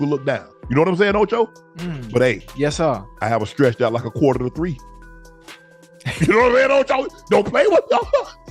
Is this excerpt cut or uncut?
cut